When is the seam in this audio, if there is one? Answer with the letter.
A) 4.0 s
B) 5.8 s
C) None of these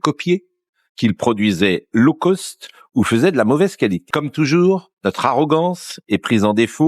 A